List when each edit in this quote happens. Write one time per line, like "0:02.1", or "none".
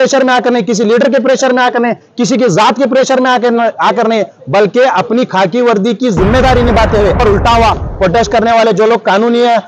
0:07.2

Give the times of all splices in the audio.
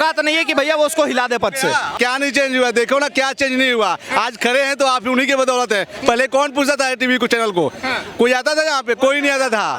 0:01.9

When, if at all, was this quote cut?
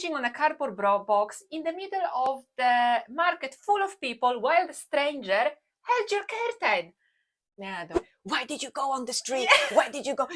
0:08.1

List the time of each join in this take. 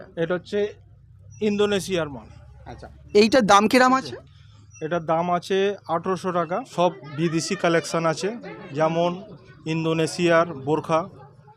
0:06.7

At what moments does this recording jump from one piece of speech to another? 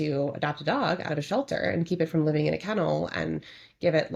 none

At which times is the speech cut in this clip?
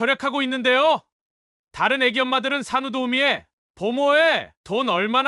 none

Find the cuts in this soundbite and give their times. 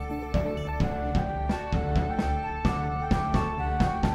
none

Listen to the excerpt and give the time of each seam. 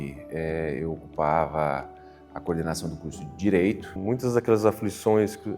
0:03.9

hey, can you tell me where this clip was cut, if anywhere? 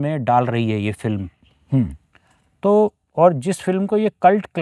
none

